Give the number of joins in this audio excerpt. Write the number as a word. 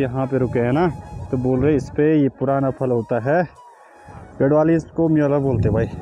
zero